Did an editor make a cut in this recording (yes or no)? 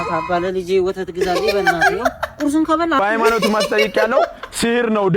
yes